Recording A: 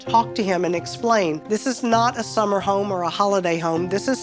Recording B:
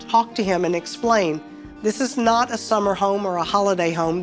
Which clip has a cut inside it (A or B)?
A